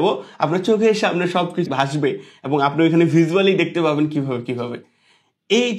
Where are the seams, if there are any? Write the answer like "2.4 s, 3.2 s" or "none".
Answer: 1.7 s